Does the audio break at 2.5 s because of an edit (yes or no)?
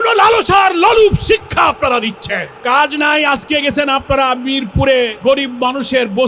yes